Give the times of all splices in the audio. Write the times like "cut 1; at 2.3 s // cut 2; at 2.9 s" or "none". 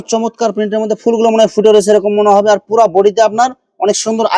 none